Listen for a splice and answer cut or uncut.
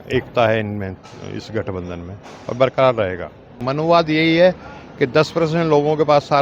cut